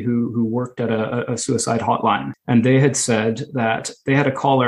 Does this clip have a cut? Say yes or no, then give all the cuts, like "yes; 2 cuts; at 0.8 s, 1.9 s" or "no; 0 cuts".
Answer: yes; 1 cut; at 2.3 s